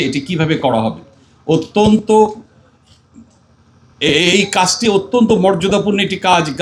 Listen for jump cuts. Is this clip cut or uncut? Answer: uncut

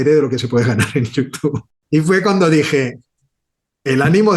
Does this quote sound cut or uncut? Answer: cut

